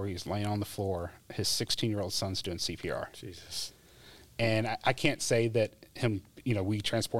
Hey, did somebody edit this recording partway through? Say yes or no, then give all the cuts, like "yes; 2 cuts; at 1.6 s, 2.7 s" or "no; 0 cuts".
no; 0 cuts